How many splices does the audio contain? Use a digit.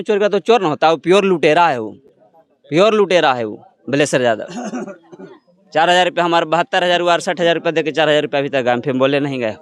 0